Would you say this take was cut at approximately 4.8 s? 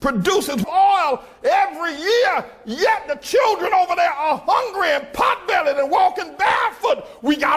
no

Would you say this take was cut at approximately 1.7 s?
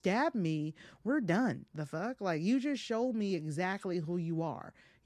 no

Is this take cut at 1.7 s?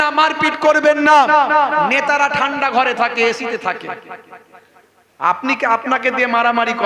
no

